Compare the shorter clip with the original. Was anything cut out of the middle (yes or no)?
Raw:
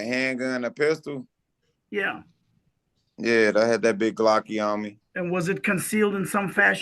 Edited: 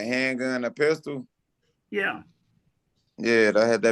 no